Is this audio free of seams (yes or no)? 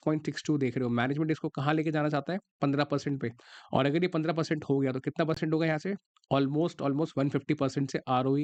yes